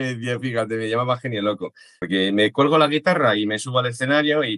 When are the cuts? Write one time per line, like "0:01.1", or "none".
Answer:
0:01.9